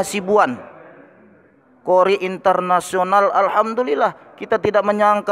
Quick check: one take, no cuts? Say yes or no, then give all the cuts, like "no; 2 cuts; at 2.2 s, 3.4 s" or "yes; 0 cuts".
yes; 0 cuts